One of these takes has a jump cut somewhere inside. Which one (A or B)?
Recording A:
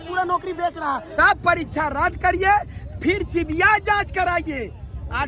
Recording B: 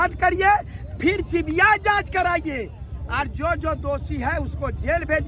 A